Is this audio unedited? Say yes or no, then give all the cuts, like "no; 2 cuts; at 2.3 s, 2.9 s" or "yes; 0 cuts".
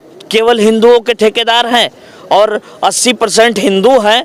yes; 0 cuts